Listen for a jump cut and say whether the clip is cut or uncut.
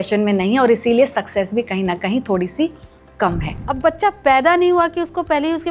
cut